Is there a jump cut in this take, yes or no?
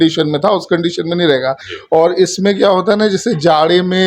yes